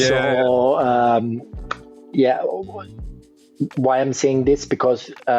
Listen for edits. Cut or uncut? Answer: uncut